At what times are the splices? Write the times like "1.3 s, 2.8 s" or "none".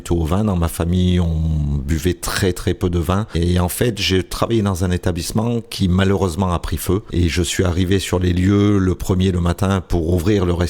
3.4 s, 7.1 s